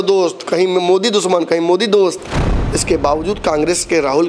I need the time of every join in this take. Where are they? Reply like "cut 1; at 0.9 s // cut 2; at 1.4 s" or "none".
cut 1; at 2.5 s